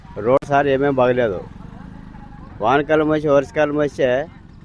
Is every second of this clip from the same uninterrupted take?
yes; 0 cuts

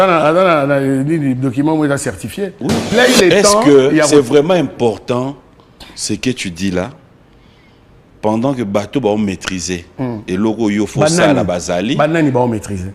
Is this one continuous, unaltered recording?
no; 1 cut; at 2.9 s

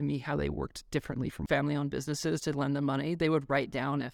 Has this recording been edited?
yes; 1 cut; at 1.4 s

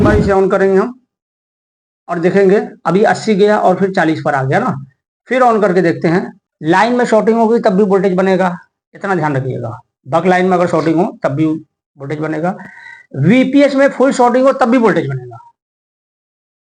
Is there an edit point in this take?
yes; 1 cut; at 6.4 s

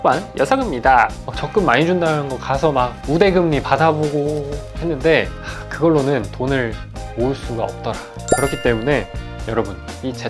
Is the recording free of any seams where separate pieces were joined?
no; 2 cuts; at 1.2 s, 8.1 s

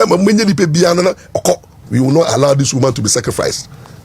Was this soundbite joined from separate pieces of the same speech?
yes; 1 cut; at 1.7 s

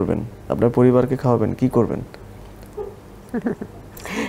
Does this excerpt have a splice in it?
no; 0 cuts

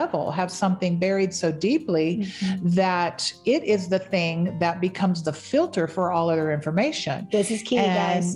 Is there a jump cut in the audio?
no; 0 cuts

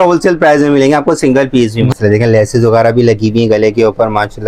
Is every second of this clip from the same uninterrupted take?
no; 1 cut; at 1.9 s

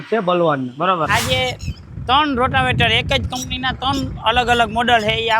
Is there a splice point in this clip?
yes; 1 cut; at 1.1 s

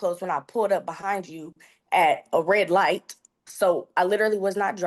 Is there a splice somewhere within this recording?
no; 0 cuts

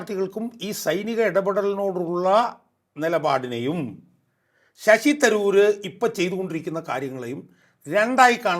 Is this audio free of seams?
yes; 0 cuts

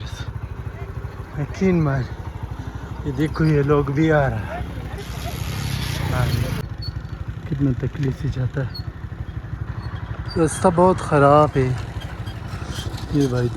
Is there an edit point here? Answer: yes; 1 cut; at 6.5 s

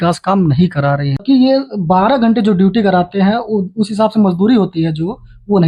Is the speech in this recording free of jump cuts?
no; 1 cut; at 1.2 s

